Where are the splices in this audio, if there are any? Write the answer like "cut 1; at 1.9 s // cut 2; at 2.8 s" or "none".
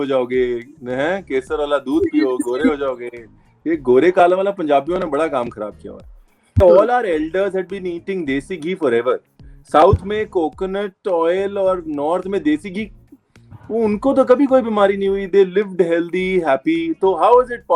cut 1; at 6.6 s